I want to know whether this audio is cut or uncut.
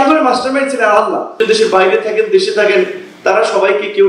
cut